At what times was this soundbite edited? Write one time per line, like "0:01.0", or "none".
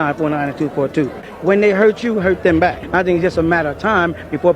0:01.3
0:02.8